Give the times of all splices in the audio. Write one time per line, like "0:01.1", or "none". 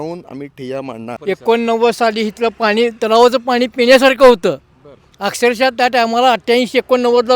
0:01.2